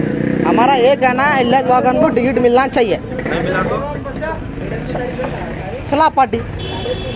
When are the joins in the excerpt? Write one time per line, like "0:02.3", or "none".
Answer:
none